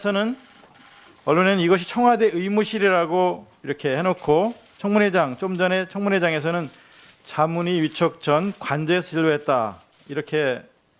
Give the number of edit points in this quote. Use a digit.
1